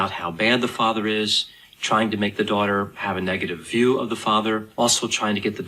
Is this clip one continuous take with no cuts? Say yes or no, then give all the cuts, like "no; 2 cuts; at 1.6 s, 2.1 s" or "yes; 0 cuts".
no; 1 cut; at 4.7 s